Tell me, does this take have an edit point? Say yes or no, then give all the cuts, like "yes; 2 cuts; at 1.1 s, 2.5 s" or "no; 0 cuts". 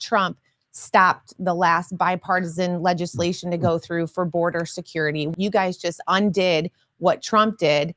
yes; 1 cut; at 5.3 s